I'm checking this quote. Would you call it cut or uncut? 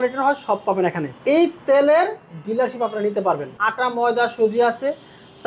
cut